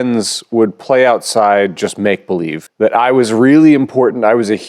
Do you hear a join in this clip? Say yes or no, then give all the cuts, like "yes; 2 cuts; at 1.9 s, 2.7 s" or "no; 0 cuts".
yes; 1 cut; at 2.6 s